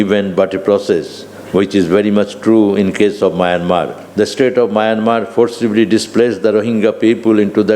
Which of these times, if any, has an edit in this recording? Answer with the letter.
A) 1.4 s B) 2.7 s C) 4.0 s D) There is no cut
C